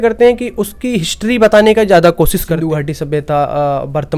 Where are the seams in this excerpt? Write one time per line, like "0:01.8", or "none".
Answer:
0:02.5